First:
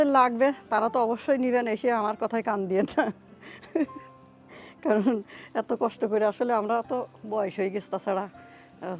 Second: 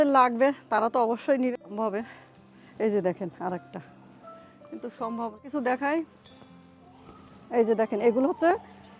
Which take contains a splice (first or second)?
second